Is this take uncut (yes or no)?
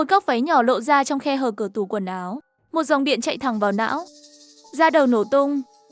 yes